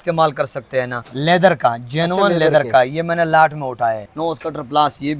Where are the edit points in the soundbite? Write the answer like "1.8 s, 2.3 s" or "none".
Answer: 1.1 s, 4.1 s